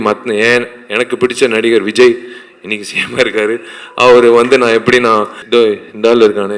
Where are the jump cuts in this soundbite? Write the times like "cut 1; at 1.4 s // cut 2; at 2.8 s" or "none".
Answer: cut 1; at 5.4 s